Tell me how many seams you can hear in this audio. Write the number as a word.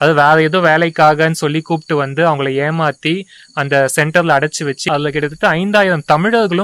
one